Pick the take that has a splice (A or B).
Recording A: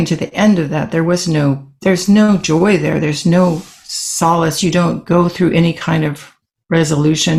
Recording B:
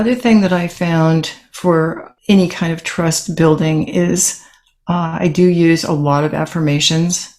B